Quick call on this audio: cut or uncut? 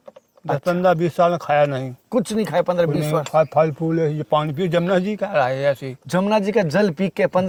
uncut